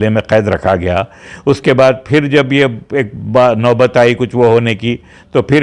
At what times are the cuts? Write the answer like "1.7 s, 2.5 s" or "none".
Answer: none

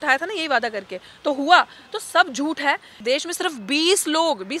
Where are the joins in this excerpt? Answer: 3.0 s

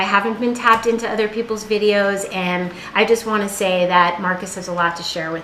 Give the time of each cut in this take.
4.4 s

